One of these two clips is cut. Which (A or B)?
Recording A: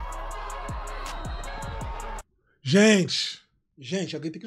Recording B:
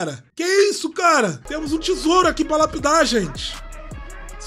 B